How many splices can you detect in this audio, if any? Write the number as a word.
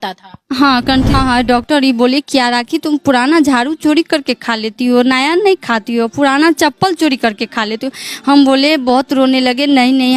one